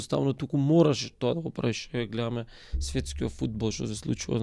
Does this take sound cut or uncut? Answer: uncut